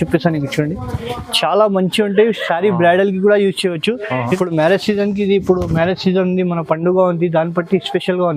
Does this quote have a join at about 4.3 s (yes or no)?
yes